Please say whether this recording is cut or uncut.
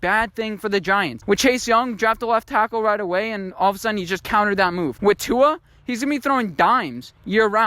cut